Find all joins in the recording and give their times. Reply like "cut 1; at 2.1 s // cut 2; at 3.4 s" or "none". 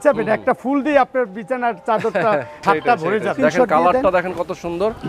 cut 1; at 3.3 s

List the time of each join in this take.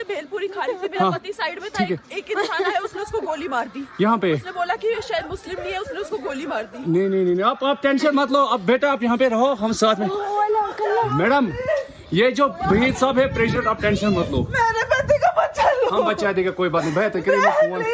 cut 1; at 1.9 s

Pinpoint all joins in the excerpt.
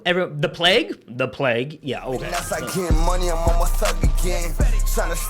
cut 1; at 2.3 s

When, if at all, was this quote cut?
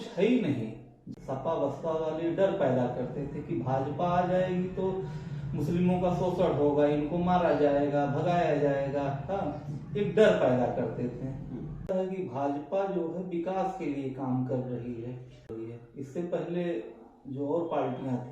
cut 1; at 1.0 s // cut 2; at 11.9 s // cut 3; at 15.5 s

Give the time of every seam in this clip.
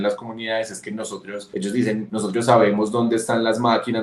cut 1; at 1.4 s // cut 2; at 2.1 s

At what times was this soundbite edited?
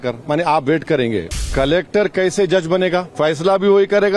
cut 1; at 1.5 s // cut 2; at 3.1 s

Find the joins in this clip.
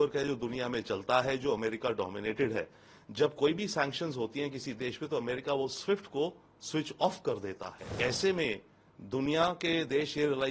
cut 1; at 7.9 s

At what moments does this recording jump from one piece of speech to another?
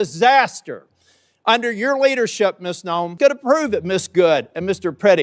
cut 1; at 3.1 s

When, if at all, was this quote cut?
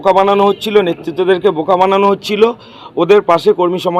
none

